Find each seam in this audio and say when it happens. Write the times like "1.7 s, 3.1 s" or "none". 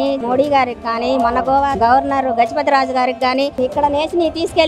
1.7 s, 3.5 s